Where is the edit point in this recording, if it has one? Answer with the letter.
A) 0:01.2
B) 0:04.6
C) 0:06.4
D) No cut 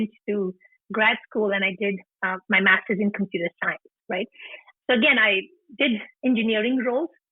B